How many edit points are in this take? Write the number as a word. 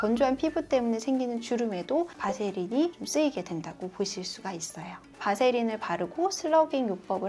one